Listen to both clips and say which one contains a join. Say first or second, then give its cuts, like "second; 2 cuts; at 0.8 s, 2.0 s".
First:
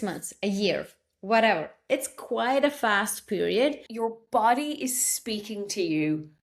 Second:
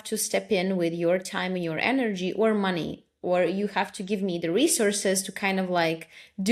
first; 1 cut; at 3.9 s